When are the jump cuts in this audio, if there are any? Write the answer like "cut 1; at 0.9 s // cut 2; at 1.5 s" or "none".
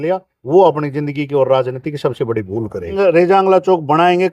cut 1; at 3.0 s